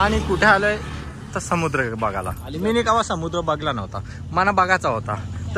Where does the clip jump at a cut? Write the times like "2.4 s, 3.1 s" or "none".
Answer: none